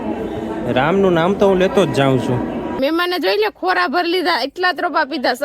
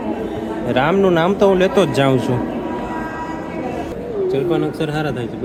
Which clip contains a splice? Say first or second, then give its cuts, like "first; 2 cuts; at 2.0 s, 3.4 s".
first; 1 cut; at 2.8 s